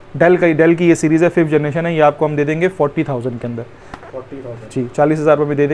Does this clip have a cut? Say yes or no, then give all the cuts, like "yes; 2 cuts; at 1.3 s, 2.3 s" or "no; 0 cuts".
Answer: no; 0 cuts